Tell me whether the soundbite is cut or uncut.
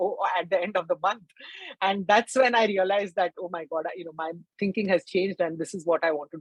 uncut